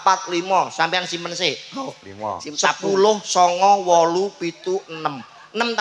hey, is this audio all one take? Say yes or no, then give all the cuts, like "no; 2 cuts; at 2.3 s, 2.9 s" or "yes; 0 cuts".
yes; 0 cuts